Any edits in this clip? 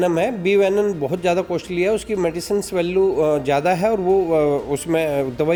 no; 0 cuts

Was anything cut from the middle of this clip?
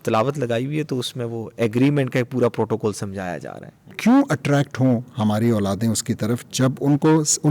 yes; 1 cut; at 3.9 s

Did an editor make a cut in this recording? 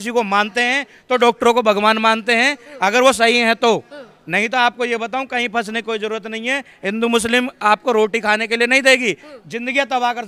no; 0 cuts

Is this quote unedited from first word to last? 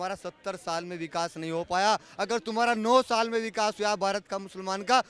yes; 0 cuts

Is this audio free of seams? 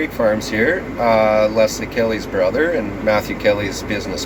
yes; 0 cuts

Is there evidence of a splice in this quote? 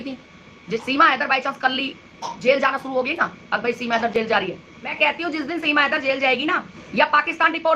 yes; 2 cuts; at 0.8 s, 4.9 s

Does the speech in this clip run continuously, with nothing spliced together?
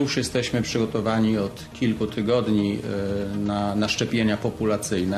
yes; 0 cuts

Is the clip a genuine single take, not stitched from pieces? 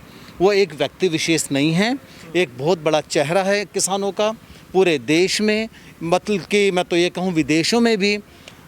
yes; 0 cuts

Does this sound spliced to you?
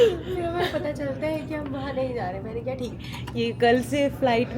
yes; 1 cut; at 3.2 s

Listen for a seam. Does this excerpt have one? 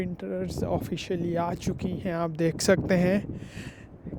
no; 0 cuts

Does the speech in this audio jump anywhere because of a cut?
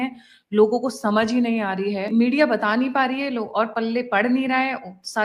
yes; 1 cut; at 2.1 s

